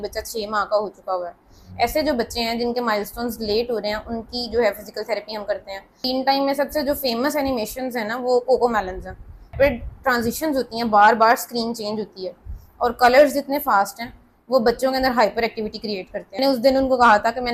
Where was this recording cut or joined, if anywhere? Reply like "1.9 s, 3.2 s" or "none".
5.9 s, 9.5 s, 16.4 s